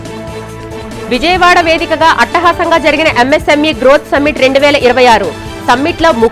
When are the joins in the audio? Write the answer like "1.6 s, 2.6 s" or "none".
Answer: 1.1 s